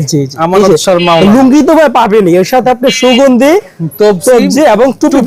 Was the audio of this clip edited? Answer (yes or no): no